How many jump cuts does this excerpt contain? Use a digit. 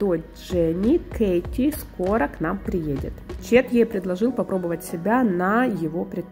1